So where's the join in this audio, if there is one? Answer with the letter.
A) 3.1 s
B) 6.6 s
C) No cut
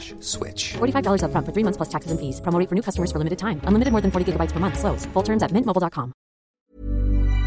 B